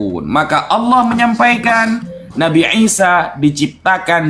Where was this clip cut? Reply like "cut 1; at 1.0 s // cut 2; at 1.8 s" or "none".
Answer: none